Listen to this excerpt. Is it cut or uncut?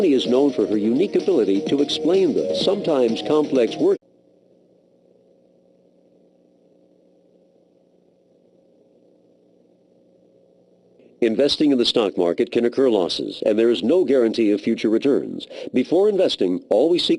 uncut